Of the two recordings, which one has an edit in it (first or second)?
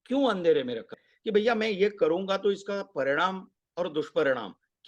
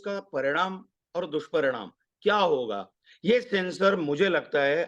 first